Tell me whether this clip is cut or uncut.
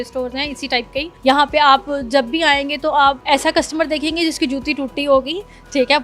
cut